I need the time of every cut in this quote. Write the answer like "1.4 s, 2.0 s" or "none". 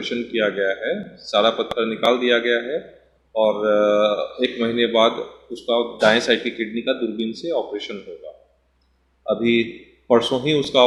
none